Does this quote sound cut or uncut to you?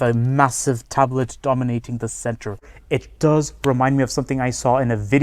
cut